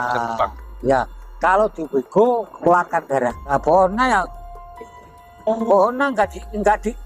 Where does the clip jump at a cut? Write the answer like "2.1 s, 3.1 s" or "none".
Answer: 2.6 s, 3.5 s

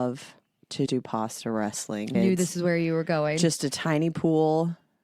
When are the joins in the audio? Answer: 2.1 s

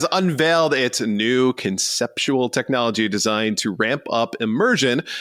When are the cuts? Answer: none

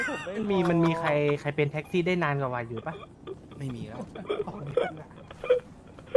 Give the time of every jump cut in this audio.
none

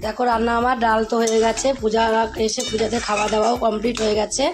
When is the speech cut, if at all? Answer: none

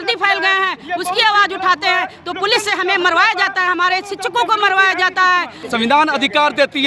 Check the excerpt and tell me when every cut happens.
5.6 s

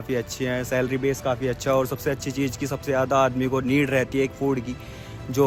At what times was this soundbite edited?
none

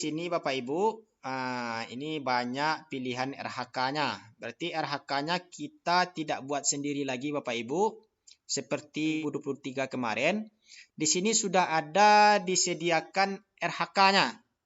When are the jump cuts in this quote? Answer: 9.2 s

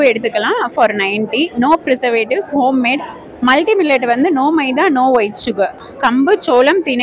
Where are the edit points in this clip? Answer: 5.9 s

